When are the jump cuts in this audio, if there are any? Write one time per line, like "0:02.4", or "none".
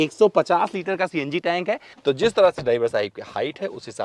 0:01.9